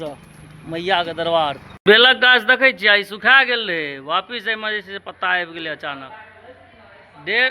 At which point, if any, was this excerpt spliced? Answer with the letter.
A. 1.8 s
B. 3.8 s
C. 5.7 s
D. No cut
A